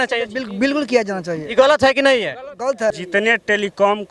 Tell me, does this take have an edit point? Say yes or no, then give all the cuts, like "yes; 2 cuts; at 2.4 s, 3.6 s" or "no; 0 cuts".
yes; 1 cut; at 2.9 s